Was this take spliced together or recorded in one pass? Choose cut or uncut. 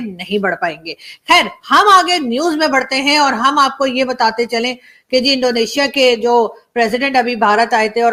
uncut